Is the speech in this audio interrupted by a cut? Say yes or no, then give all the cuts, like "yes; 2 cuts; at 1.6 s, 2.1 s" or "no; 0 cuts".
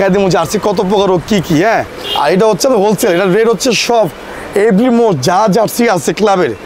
yes; 1 cut; at 1.9 s